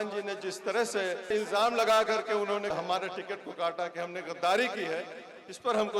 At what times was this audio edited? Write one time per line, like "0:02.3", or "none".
0:01.2
0:02.7